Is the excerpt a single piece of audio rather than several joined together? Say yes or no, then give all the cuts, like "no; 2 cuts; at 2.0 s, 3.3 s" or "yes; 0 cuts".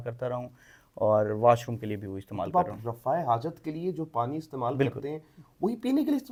yes; 0 cuts